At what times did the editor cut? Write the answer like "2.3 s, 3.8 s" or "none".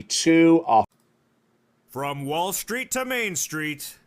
0.9 s